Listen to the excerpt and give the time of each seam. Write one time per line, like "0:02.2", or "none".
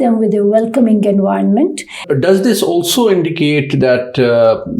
0:02.0